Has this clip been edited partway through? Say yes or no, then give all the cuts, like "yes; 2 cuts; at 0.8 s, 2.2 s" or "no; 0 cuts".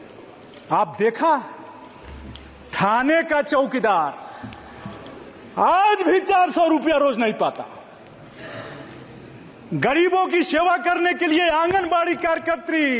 no; 0 cuts